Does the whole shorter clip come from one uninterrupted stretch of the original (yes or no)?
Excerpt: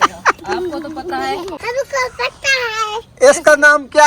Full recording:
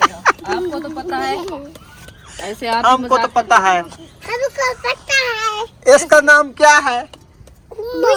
no